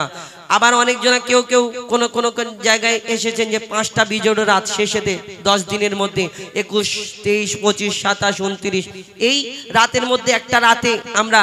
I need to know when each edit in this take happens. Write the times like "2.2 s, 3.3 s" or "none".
none